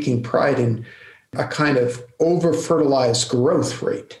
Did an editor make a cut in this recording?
yes; 1 cut; at 1.3 s

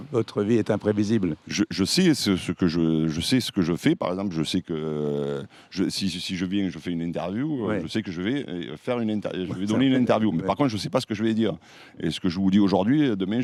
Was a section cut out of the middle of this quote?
no; 0 cuts

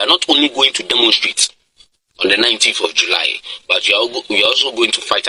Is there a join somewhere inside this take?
no; 0 cuts

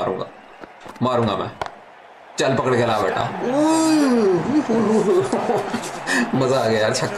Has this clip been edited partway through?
no; 0 cuts

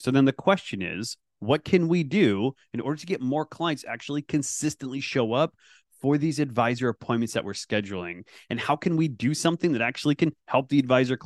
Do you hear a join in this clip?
no; 0 cuts

